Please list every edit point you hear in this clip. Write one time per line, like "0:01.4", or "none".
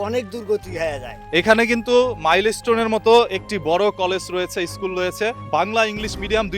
0:01.1